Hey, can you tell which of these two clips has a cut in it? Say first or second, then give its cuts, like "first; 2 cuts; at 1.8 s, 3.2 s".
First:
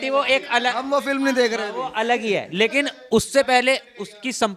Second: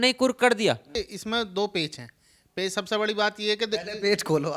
second; 1 cut; at 1.0 s